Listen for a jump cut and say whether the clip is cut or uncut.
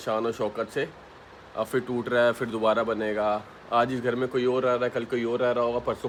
uncut